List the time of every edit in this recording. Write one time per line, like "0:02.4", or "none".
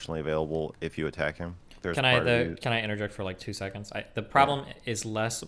0:01.7